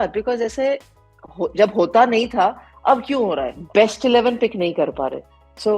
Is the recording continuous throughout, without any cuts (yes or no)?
no